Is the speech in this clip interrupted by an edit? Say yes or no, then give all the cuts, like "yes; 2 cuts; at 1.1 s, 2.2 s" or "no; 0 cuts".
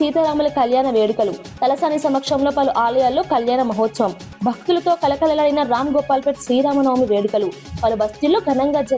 no; 0 cuts